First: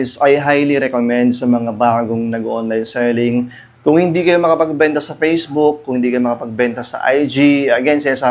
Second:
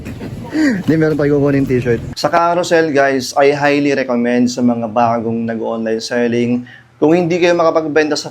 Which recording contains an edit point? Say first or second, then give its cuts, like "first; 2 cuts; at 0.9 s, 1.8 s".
second; 1 cut; at 2.1 s